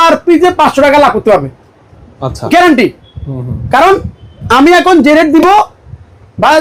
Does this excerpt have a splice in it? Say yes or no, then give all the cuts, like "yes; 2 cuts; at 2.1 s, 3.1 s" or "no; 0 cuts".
no; 0 cuts